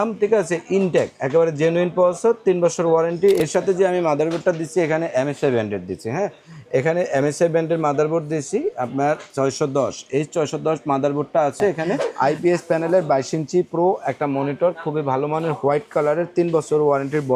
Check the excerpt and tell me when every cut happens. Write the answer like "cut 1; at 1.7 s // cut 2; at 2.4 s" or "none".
cut 1; at 3.4 s // cut 2; at 12.1 s